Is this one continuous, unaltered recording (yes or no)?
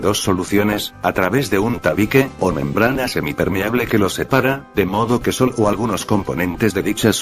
yes